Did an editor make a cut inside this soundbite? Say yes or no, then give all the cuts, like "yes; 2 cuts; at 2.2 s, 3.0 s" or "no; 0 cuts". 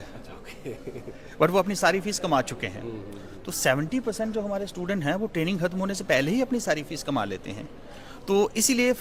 no; 0 cuts